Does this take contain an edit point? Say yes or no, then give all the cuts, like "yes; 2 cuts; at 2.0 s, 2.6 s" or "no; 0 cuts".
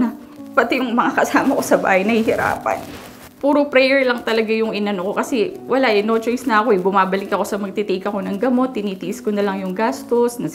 no; 0 cuts